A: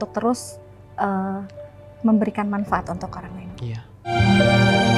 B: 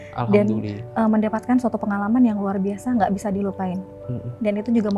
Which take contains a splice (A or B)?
A